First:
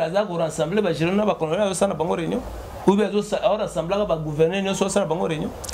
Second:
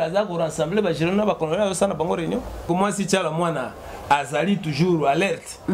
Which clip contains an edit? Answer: second; 1 cut; at 2.7 s

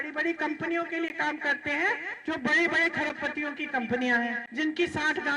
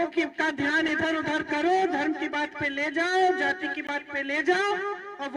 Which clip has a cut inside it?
first; 2 cuts; at 2.1 s, 4.4 s

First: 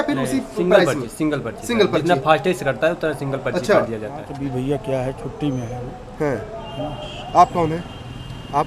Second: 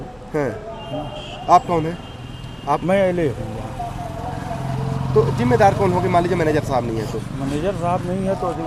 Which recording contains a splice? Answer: first; 1 cut; at 4.2 s

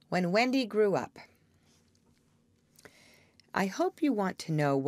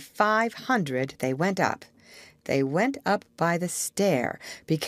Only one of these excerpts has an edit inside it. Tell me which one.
second; 1 cut; at 3.2 s

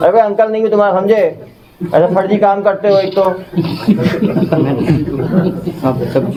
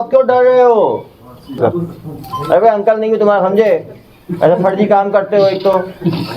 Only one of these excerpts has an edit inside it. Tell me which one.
second; 1 cut; at 1.6 s

